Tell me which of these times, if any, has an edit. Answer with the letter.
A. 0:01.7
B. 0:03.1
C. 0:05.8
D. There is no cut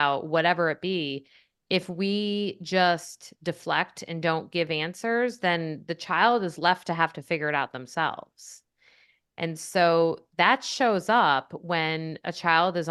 D